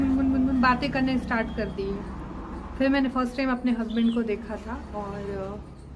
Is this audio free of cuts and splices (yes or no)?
yes